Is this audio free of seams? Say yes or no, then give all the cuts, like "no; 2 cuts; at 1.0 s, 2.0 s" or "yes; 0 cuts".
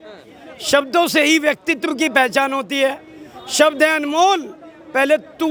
yes; 0 cuts